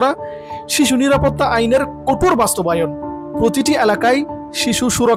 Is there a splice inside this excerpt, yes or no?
no